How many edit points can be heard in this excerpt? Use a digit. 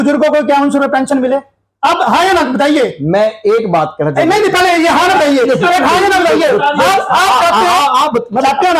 0